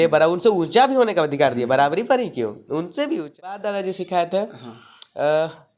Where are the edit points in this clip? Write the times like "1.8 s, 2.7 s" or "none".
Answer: 3.5 s